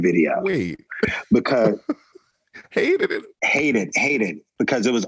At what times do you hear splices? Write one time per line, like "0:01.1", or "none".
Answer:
0:03.2